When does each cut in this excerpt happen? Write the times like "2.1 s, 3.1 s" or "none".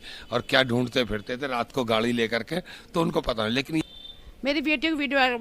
3.8 s